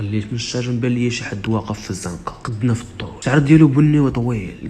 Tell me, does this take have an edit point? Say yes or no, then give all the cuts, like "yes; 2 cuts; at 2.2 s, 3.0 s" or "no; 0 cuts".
yes; 2 cuts; at 2.4 s, 3.1 s